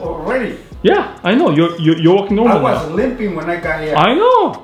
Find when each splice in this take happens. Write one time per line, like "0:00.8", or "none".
none